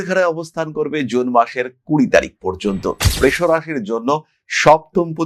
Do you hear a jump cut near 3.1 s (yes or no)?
yes